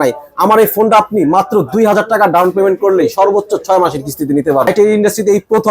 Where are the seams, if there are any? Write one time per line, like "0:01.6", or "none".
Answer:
0:04.7